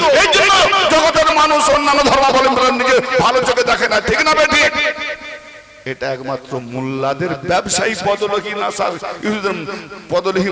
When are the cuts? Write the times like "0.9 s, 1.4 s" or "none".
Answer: none